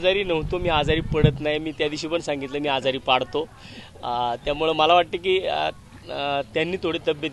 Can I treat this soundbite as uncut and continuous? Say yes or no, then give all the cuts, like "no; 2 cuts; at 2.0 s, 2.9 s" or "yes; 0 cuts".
yes; 0 cuts